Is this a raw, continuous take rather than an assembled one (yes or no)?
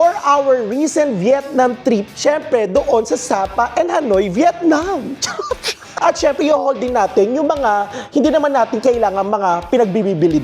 no